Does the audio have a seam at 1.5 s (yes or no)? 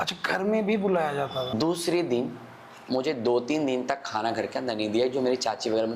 yes